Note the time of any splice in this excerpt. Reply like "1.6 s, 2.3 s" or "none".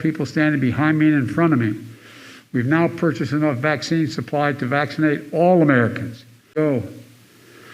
6.6 s